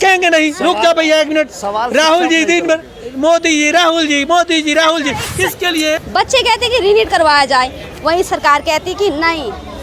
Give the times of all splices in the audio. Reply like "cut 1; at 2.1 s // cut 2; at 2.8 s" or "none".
cut 1; at 6.0 s